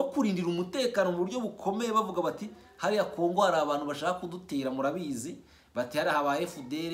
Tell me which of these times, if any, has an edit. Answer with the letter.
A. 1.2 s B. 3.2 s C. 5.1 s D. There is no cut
D